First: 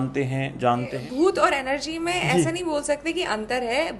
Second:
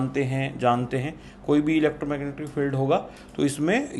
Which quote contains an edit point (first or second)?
first